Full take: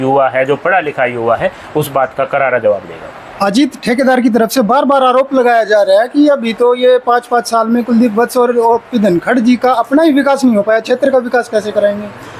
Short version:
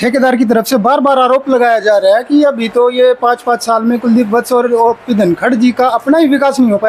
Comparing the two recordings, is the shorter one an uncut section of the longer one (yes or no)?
yes